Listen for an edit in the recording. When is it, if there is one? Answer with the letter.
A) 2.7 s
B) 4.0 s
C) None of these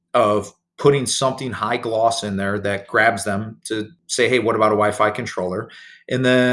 B